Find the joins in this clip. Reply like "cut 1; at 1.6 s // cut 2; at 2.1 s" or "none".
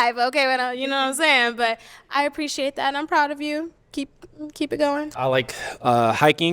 cut 1; at 5.1 s